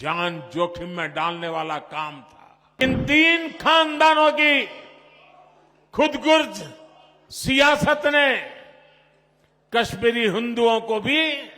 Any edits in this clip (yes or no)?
yes